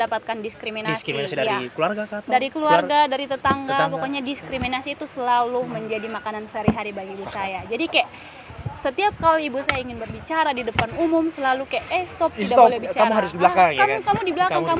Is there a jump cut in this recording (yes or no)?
no